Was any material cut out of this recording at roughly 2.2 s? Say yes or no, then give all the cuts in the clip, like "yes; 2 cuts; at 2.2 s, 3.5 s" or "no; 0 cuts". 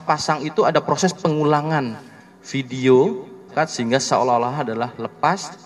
no; 1 cut; at 3.5 s